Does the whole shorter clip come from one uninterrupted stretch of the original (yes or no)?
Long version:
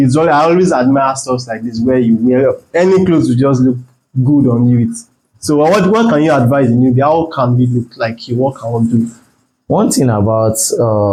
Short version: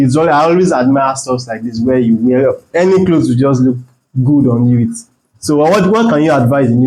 yes